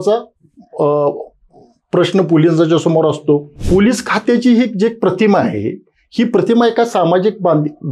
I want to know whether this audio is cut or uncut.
cut